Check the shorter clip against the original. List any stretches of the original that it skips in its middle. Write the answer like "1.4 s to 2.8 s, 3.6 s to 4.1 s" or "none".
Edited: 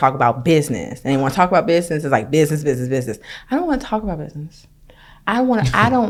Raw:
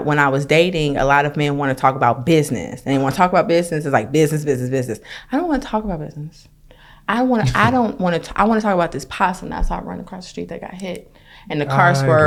none